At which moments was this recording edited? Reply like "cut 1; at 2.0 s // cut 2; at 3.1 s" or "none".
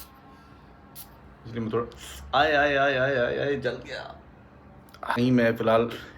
cut 1; at 5.2 s